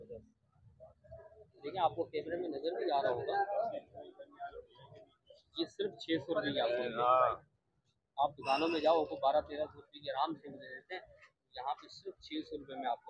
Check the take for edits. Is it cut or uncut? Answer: uncut